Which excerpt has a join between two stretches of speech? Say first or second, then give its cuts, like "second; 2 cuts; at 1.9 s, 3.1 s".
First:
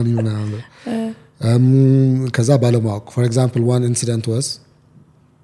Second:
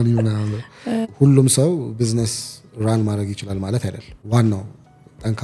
second; 2 cuts; at 1.1 s, 4.1 s